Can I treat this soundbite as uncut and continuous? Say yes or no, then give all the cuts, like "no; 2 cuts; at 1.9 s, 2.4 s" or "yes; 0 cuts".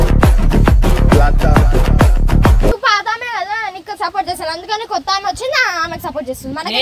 no; 1 cut; at 2.8 s